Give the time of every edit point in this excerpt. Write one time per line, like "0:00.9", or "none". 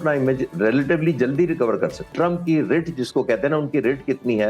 0:02.0